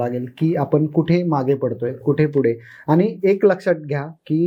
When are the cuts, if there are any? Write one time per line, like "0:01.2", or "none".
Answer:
none